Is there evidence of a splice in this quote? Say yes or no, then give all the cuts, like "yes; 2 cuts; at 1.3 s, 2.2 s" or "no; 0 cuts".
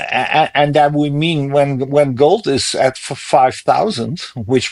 no; 0 cuts